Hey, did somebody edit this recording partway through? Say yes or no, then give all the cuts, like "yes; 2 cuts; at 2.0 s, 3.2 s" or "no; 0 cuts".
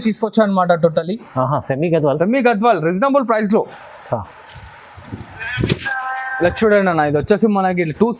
no; 0 cuts